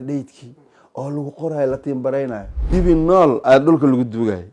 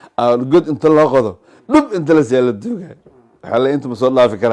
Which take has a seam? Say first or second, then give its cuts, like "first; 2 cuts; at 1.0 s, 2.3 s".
first; 1 cut; at 2.5 s